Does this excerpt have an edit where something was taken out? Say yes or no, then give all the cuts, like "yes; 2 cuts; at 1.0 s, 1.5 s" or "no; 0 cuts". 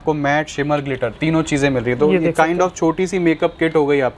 no; 0 cuts